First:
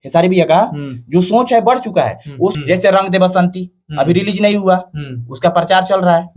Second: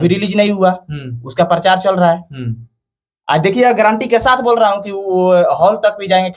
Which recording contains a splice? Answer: first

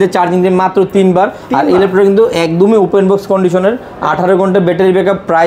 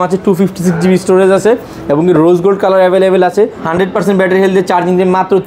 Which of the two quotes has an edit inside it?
second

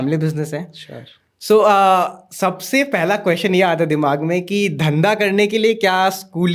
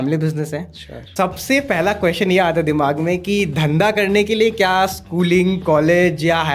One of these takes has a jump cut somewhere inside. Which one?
second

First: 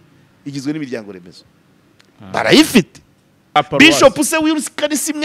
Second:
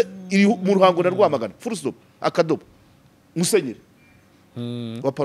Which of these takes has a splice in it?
first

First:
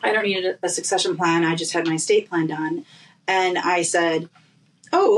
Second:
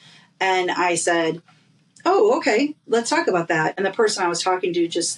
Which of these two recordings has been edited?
second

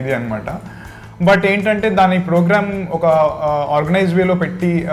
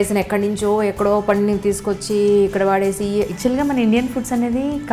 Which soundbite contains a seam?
second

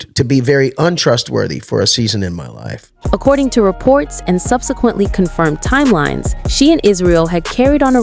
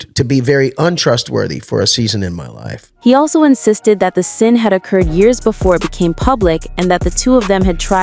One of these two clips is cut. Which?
first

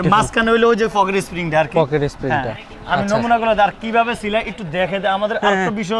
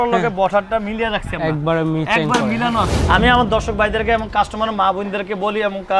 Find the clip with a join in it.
second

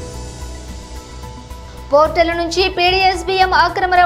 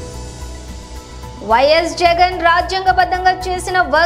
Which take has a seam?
second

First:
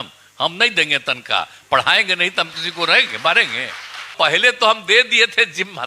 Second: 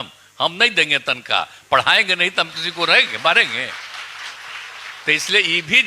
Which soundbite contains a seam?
first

